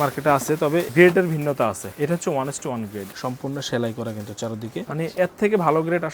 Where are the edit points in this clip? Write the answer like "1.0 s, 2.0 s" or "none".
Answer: 0.9 s, 1.9 s, 3.1 s, 4.9 s